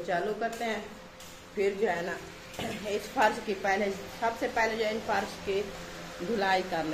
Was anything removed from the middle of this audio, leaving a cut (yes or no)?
no